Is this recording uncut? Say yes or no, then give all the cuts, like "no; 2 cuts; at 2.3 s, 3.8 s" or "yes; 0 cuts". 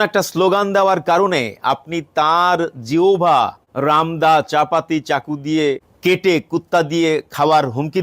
no; 2 cuts; at 3.6 s, 5.9 s